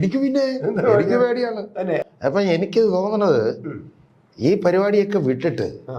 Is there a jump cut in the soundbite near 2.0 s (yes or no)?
yes